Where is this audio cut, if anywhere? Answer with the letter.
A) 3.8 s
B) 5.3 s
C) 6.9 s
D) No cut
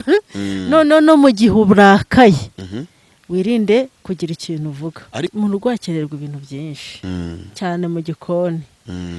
B